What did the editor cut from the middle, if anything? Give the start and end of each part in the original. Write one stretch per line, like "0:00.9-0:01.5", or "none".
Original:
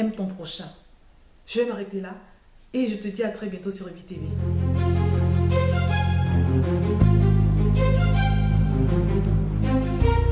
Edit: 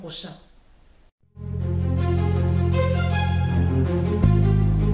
0:01.4-0:03.9